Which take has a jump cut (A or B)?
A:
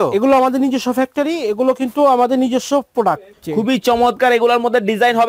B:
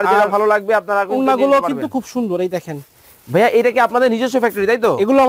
A